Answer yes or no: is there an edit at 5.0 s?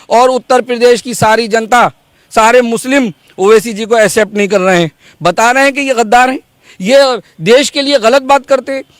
no